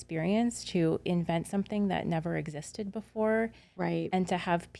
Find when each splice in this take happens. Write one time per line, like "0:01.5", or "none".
none

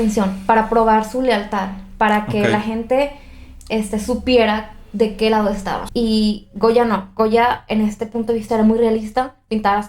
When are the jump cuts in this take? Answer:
0:05.8

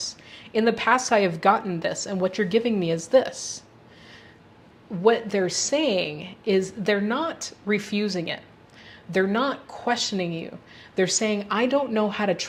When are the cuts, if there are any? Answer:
none

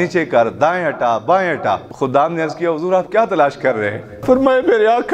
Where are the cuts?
0:01.9
0:04.2

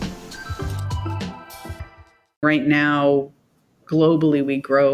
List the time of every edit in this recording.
0:02.4

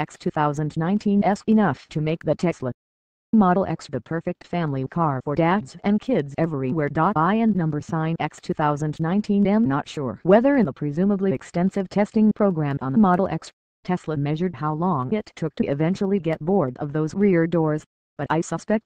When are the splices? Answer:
none

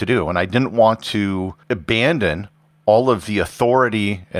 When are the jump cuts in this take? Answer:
0:01.6

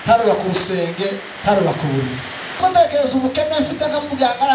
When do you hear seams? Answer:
0:02.6

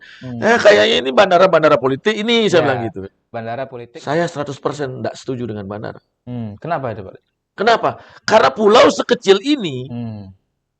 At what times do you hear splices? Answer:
0:03.6

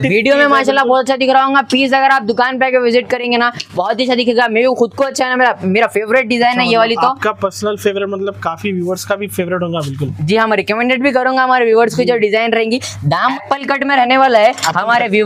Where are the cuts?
0:13.3

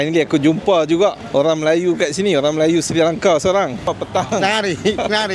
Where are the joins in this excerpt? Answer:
0:03.9

